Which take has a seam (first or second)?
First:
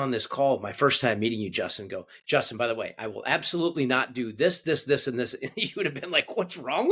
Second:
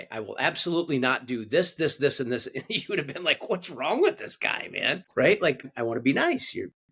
second